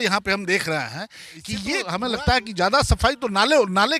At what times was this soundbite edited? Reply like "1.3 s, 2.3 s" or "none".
1.8 s